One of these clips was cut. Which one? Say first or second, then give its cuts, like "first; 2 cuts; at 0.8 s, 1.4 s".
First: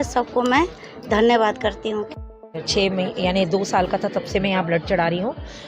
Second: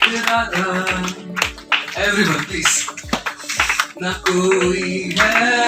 first; 1 cut; at 2.1 s